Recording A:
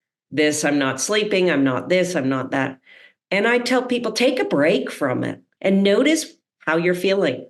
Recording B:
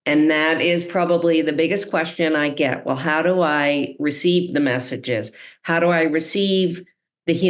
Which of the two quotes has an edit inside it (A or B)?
A